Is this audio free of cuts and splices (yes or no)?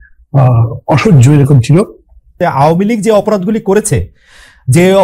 no